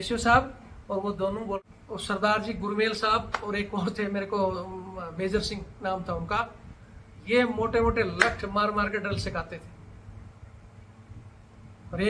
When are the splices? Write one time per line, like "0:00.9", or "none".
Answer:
0:01.6